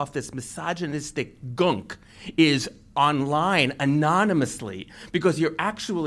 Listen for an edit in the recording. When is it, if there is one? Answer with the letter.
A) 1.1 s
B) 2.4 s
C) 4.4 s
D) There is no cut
D